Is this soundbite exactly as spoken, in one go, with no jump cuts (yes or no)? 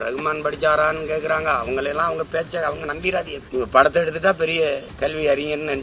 no